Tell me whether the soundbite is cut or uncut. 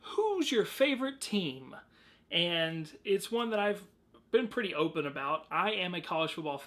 uncut